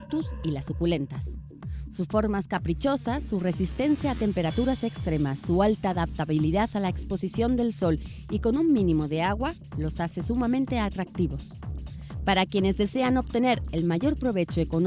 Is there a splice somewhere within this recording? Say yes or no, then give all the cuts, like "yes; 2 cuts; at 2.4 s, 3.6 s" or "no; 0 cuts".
yes; 1 cut; at 13.5 s